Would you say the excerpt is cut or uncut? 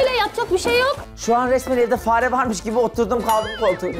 cut